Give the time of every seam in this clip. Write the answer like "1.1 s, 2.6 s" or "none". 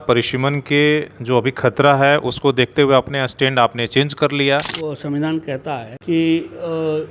4.7 s, 5.9 s